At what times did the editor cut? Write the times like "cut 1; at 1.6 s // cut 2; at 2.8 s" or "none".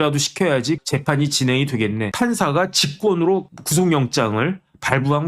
cut 1; at 0.8 s // cut 2; at 2.1 s